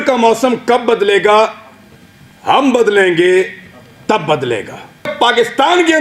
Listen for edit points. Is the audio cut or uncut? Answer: cut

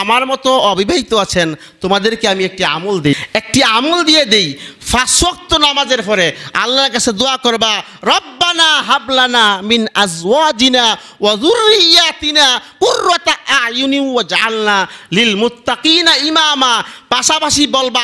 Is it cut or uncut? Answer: uncut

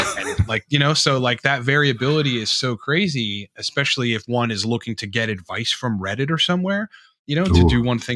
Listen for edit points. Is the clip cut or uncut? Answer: uncut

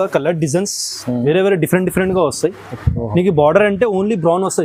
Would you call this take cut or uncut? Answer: uncut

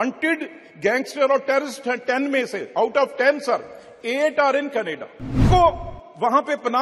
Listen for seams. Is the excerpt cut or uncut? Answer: cut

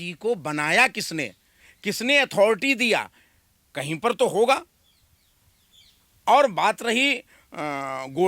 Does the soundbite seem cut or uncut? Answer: uncut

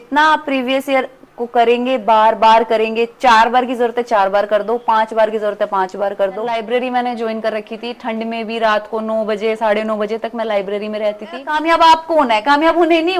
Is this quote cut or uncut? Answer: cut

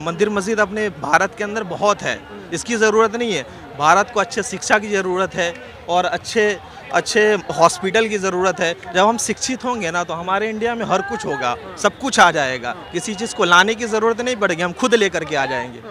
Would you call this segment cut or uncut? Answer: uncut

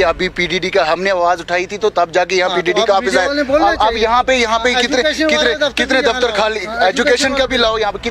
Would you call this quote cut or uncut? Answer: uncut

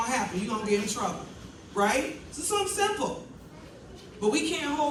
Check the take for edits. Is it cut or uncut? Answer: uncut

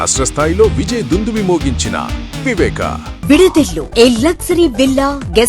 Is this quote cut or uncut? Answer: cut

